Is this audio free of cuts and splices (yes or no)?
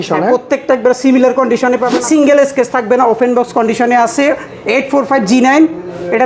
no